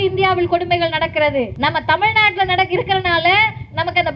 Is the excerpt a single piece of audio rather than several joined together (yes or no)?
no